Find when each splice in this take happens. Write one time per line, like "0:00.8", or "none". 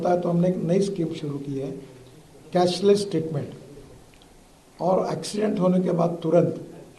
none